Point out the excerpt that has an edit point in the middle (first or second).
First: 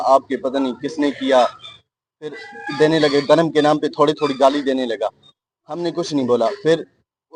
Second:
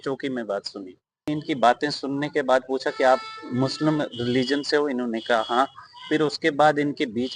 second